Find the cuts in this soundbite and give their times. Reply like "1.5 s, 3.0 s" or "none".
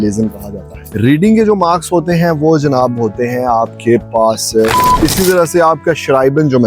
4.8 s